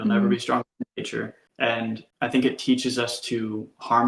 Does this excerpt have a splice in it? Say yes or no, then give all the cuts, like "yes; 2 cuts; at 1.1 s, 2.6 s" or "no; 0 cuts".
yes; 2 cuts; at 1.4 s, 2.1 s